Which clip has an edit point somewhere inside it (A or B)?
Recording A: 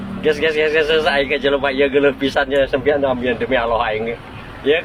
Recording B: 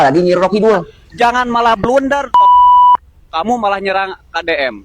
B